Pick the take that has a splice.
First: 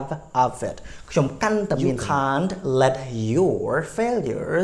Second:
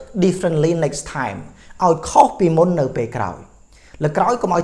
first; 1 cut; at 2.0 s

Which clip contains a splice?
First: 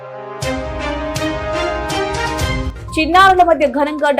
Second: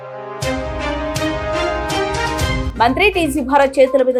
first; 1 cut; at 2.6 s

